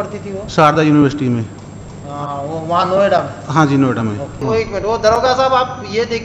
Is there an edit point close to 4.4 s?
yes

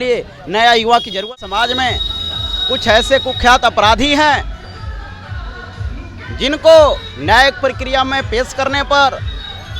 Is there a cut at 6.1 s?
no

